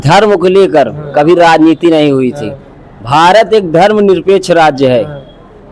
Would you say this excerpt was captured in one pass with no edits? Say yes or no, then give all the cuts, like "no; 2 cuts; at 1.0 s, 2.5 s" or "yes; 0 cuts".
yes; 0 cuts